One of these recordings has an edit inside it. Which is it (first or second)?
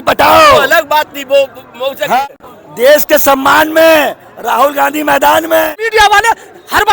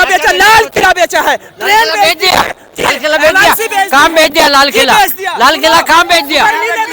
first